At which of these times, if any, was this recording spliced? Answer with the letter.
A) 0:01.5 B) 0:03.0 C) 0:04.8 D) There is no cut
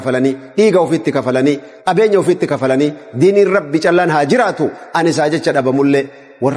D